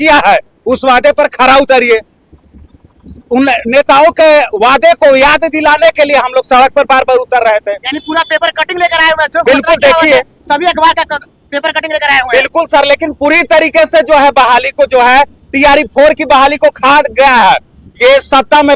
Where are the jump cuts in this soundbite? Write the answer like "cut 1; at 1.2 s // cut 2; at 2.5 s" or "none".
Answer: none